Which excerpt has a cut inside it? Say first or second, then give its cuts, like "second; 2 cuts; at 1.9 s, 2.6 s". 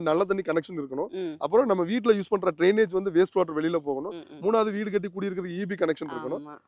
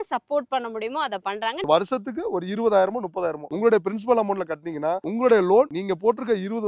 second; 4 cuts; at 1.6 s, 3.4 s, 5.0 s, 5.8 s